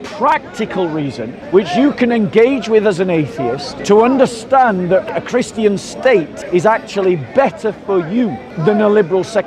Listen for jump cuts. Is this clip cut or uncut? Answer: cut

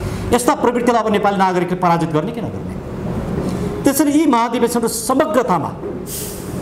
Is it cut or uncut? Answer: uncut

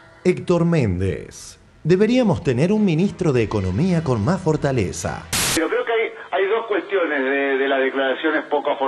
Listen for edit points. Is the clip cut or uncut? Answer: cut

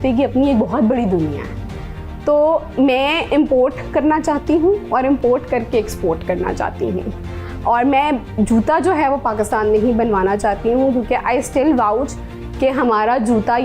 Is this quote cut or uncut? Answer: uncut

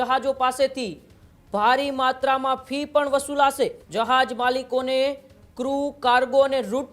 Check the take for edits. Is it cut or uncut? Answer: cut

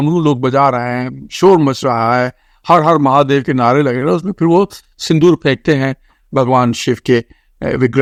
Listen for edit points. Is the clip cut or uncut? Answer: uncut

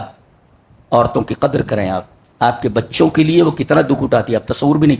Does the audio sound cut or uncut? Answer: uncut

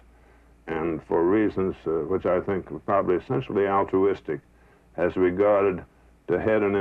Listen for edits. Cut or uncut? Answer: uncut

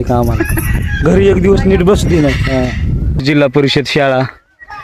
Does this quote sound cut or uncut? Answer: cut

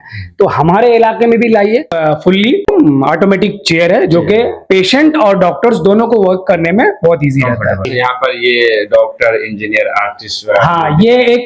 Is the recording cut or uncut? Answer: cut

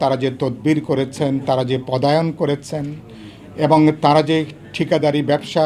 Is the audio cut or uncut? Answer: uncut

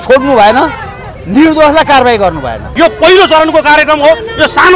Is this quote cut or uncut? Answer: cut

